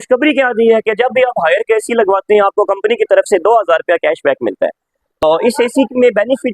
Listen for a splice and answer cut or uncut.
cut